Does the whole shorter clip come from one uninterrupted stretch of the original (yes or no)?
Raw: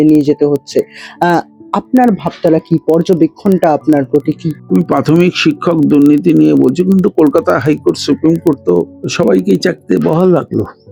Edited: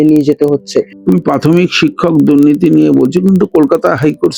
no